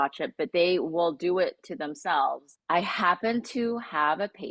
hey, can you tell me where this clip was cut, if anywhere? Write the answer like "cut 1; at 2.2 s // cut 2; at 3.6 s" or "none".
cut 1; at 2.5 s